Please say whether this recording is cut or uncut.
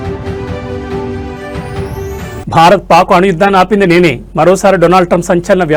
uncut